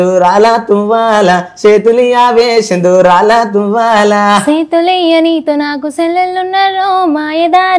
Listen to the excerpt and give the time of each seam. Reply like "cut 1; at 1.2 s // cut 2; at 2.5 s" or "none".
none